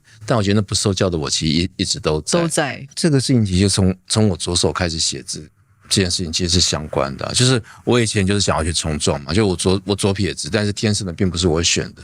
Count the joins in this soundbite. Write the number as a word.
one